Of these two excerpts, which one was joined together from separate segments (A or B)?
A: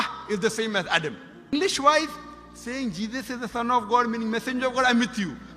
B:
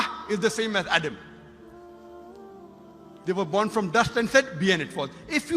A